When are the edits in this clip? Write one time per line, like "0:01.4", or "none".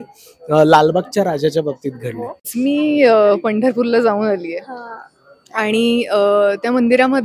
0:02.5